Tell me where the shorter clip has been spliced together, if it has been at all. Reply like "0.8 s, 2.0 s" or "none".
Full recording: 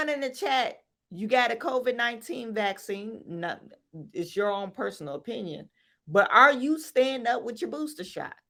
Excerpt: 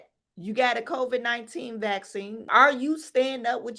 2.5 s

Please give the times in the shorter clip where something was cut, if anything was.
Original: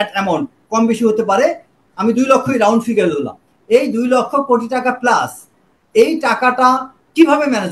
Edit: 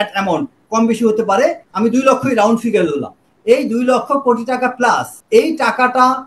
1.7 s, 5.1 s

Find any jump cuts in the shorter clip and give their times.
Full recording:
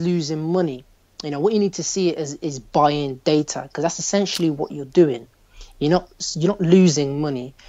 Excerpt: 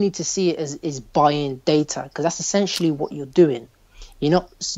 none

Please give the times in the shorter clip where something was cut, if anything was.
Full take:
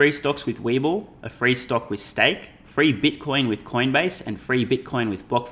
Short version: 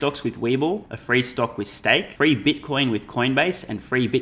0.9 s, 2.1 s

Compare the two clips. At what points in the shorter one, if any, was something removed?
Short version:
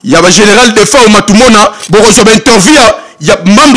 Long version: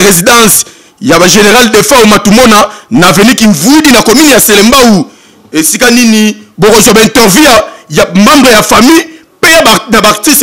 1.8 s

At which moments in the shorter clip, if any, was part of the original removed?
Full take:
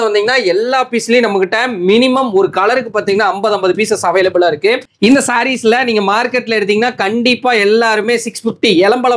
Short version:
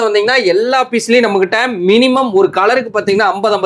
none

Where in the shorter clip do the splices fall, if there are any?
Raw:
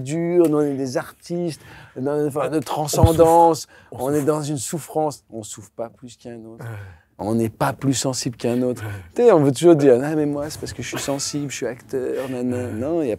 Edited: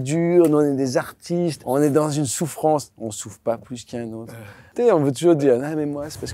1.6 s, 4.5 s

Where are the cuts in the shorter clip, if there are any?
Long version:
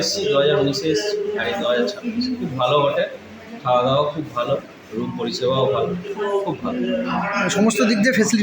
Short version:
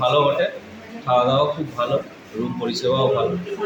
none

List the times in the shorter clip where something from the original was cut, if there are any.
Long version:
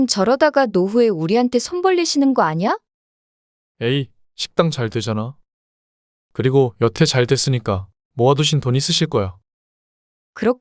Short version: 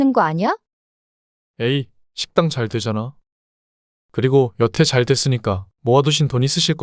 5.7 s

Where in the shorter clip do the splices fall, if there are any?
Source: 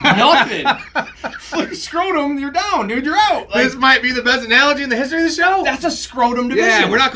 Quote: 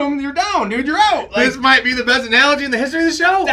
none

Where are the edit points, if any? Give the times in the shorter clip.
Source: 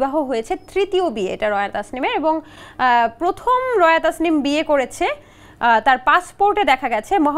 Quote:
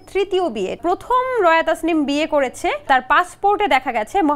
0.8 s, 2.9 s

